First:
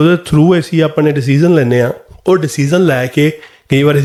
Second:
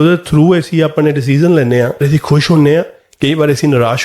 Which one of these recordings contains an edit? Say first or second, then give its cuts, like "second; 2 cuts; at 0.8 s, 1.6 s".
second; 1 cut; at 2.0 s